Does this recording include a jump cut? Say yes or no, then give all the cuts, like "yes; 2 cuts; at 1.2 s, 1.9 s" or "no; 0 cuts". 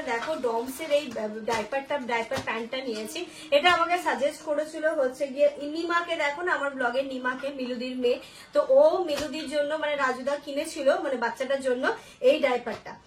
no; 0 cuts